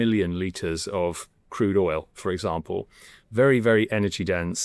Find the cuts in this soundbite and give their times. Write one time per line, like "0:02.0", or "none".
none